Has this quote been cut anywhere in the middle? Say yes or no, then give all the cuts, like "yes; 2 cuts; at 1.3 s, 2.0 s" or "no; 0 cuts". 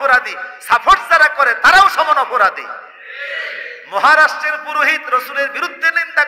no; 0 cuts